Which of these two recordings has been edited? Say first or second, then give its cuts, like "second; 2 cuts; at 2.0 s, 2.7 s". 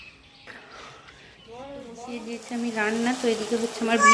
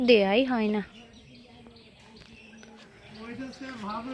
first; 1 cut; at 2.2 s